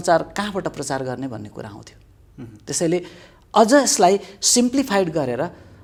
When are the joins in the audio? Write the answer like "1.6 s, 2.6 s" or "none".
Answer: none